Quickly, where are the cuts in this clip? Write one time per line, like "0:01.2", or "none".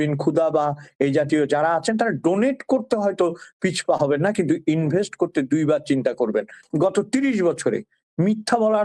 0:06.6

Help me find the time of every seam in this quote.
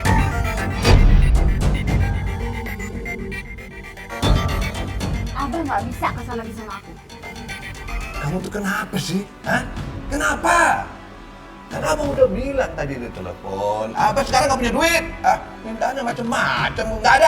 0:08.0

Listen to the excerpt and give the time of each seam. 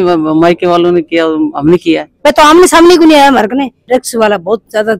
0:02.1
0:03.8

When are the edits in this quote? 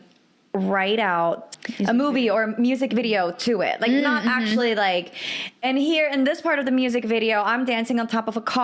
0:01.6

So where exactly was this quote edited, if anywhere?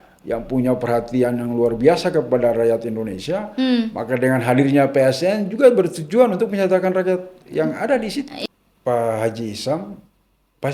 0:08.3

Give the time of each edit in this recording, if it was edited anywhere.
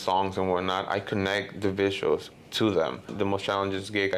0:03.1

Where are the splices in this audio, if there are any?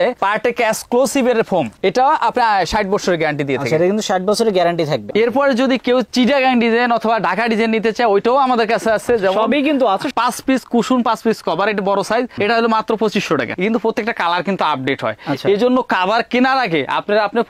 0:01.7
0:05.0
0:10.1
0:13.5

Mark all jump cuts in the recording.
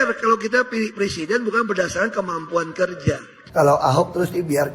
0:03.3

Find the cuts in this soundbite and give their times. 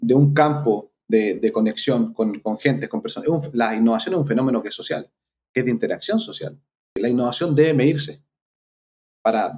0:07.0

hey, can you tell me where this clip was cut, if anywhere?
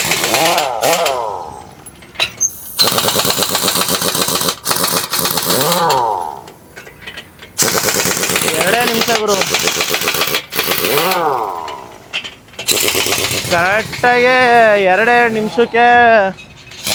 none

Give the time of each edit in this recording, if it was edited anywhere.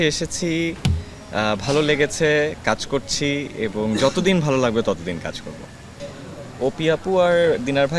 0:05.9

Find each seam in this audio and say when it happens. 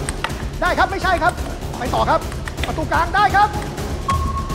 none

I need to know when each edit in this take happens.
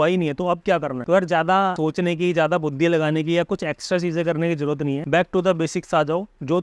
0:00.9
0:01.8
0:05.0

